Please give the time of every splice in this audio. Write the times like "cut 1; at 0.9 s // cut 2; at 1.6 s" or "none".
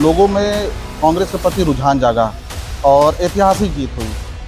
none